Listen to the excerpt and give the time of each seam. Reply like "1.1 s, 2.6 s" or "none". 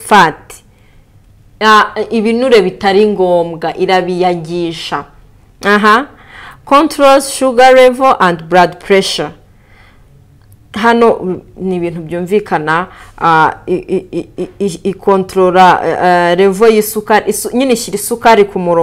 none